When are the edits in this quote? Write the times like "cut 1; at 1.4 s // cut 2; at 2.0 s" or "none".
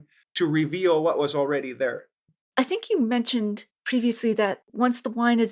cut 1; at 2.4 s // cut 2; at 4.6 s